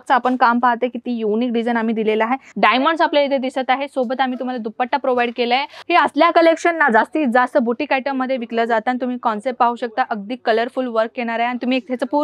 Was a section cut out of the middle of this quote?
yes; 2 cuts; at 2.4 s, 5.8 s

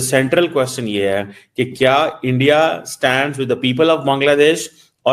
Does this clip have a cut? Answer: yes; 1 cut; at 1.7 s

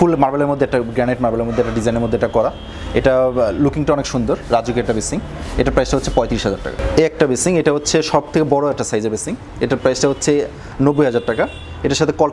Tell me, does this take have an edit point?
yes; 1 cut; at 6.8 s

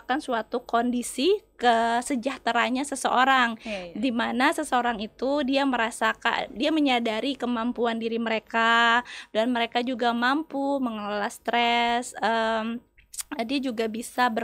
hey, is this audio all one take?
yes; 0 cuts

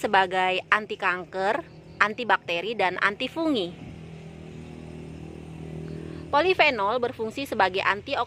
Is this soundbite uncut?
yes; 0 cuts

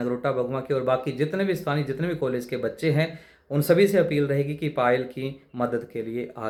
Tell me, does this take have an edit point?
no; 0 cuts

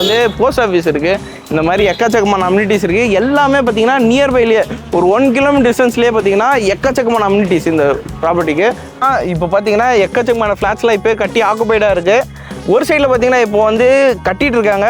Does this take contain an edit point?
yes; 1 cut; at 9.0 s

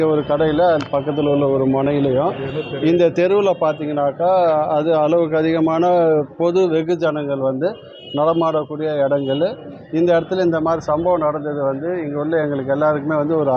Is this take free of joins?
yes; 0 cuts

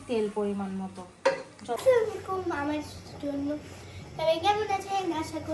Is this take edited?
yes; 1 cut; at 1.8 s

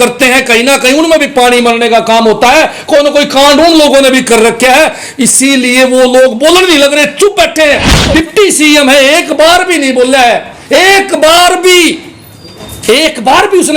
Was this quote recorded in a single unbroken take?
no; 1 cut; at 7.9 s

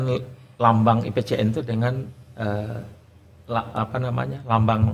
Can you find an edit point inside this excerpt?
no; 0 cuts

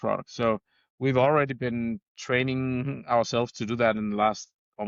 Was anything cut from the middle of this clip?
no; 0 cuts

